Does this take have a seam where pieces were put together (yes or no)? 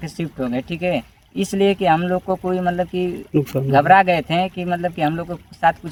no